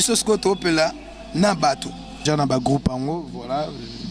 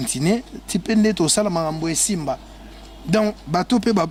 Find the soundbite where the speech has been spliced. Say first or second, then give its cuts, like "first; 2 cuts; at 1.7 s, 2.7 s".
first; 1 cut; at 2.2 s